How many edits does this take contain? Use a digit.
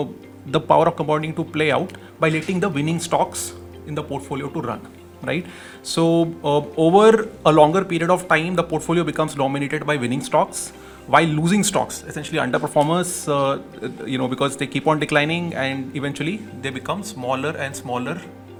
0